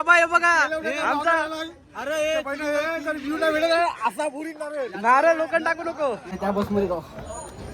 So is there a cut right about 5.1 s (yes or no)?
no